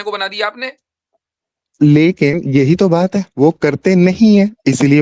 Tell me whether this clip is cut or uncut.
uncut